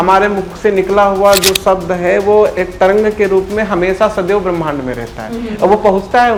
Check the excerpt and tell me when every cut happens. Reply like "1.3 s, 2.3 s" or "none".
none